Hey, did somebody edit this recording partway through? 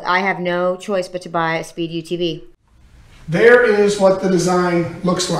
yes; 1 cut; at 2.6 s

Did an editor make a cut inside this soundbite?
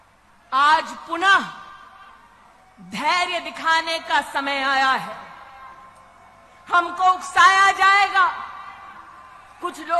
no; 0 cuts

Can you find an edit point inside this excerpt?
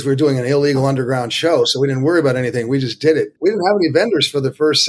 yes; 1 cut; at 3.3 s

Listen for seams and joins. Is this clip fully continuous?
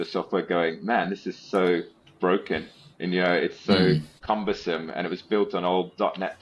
no; 1 cut; at 4.1 s

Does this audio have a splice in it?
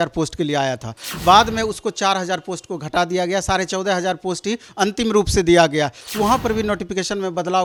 no; 0 cuts

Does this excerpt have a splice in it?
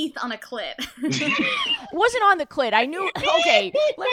no; 0 cuts

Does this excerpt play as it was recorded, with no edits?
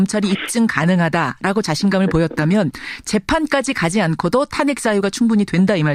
yes; 0 cuts

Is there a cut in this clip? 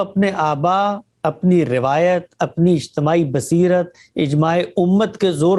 no; 0 cuts

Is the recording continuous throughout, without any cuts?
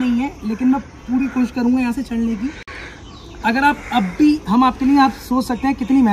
yes; 0 cuts

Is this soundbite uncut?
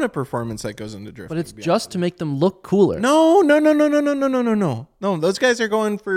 yes; 0 cuts

